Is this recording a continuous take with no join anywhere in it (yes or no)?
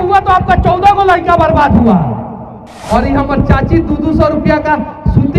no